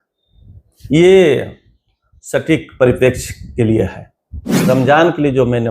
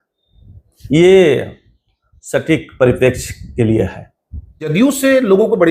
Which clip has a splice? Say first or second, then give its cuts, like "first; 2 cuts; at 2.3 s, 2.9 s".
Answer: first; 1 cut; at 4.6 s